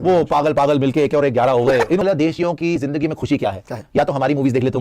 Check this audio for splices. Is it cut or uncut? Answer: cut